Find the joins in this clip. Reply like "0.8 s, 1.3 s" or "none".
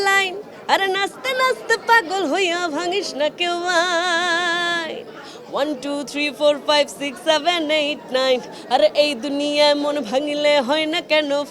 none